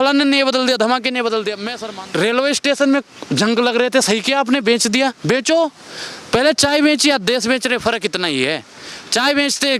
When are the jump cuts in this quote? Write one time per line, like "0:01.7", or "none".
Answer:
0:01.7